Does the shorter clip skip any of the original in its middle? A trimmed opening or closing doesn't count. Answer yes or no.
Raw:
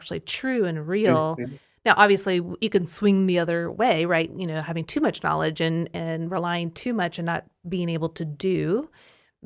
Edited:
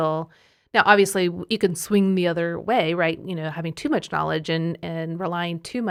no